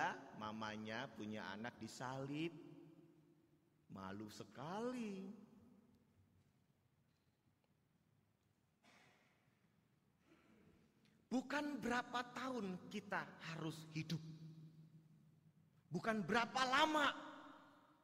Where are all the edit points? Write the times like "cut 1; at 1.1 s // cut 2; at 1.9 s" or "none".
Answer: none